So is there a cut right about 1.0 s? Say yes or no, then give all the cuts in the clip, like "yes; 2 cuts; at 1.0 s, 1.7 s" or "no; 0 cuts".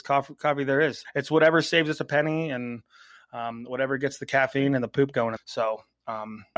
yes; 1 cut; at 1.0 s